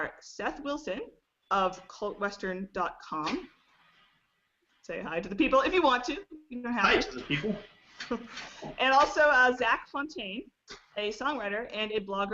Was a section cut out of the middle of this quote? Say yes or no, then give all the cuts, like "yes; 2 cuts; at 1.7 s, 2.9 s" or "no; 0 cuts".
no; 0 cuts